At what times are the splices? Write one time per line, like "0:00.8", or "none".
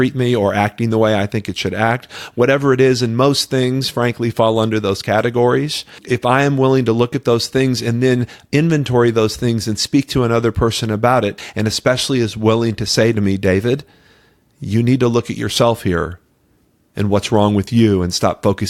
0:06.0
0:11.4